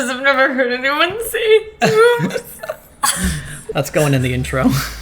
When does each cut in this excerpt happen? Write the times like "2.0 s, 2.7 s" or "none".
3.6 s